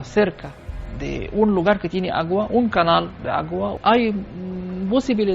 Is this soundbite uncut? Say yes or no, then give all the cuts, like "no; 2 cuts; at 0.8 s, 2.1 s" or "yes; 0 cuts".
yes; 0 cuts